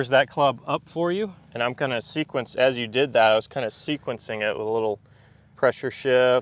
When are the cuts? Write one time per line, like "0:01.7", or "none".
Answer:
none